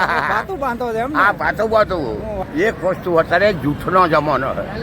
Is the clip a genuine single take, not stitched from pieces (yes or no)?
no